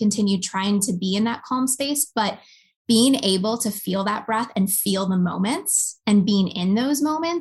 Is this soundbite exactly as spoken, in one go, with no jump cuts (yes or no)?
yes